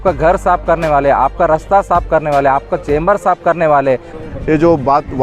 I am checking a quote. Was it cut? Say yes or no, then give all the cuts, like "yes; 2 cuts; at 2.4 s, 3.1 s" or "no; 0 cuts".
yes; 1 cut; at 4.1 s